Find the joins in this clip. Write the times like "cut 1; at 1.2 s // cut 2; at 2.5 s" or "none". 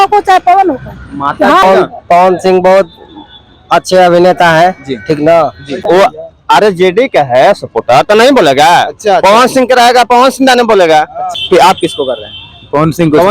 cut 1; at 1.6 s // cut 2; at 5.8 s // cut 3; at 11.2 s